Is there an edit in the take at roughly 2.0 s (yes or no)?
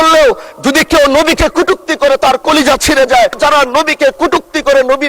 no